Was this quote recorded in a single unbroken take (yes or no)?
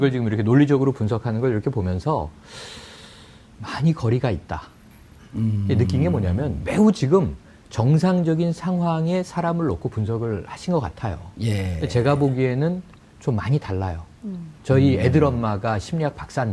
yes